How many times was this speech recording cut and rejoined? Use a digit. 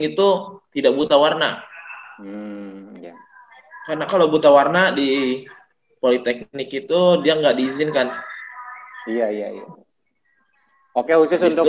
0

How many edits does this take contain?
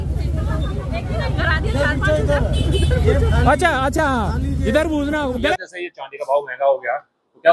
1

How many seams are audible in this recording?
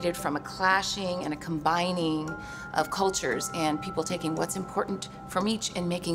0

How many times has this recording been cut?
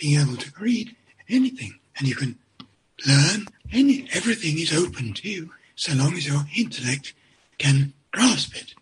1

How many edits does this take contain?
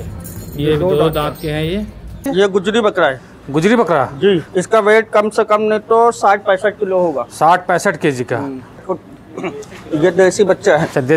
3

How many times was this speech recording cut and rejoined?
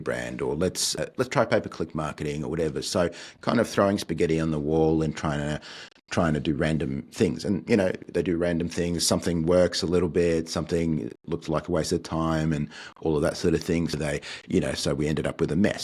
2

